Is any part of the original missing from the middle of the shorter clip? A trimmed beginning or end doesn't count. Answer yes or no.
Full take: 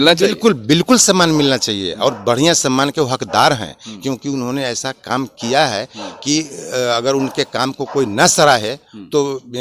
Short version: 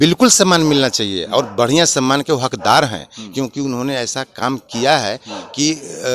no